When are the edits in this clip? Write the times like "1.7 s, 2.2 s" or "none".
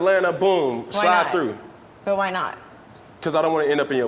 3.0 s